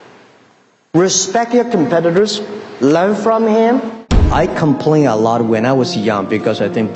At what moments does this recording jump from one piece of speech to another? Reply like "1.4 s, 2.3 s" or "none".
4.1 s